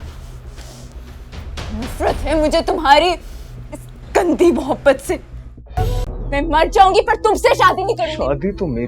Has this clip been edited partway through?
yes; 1 cut; at 6.1 s

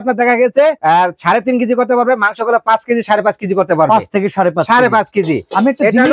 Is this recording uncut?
yes; 0 cuts

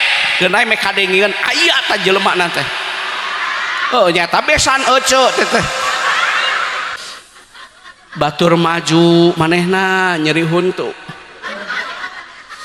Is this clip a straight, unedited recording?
no; 1 cut; at 7.0 s

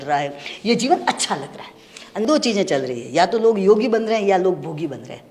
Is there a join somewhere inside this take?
yes; 1 cut; at 2.2 s

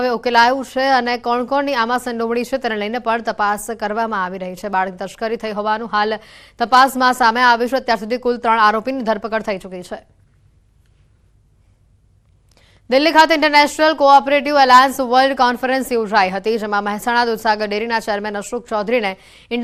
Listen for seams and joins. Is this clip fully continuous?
yes; 0 cuts

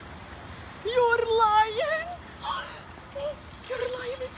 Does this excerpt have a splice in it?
no; 0 cuts

